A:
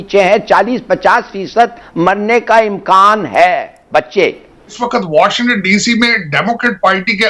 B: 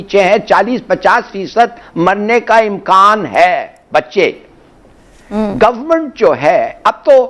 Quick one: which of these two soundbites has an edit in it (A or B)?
A